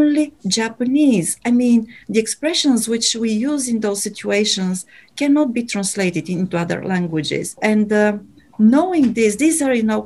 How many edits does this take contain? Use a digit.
0